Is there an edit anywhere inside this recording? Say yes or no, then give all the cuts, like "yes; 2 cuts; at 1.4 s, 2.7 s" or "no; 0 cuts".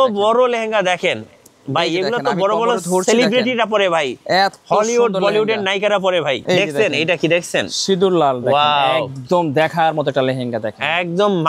yes; 1 cut; at 6.4 s